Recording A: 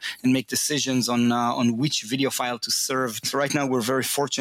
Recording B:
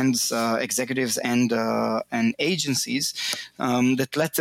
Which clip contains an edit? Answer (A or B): A